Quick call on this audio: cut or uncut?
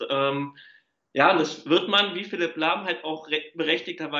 uncut